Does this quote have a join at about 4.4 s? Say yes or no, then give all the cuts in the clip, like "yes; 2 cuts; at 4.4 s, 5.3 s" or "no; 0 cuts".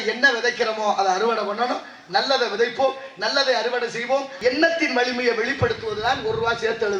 yes; 1 cut; at 4.4 s